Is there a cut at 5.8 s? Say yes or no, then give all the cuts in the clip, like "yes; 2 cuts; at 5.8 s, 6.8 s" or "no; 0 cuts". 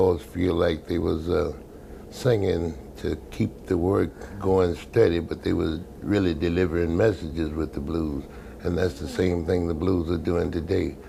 no; 0 cuts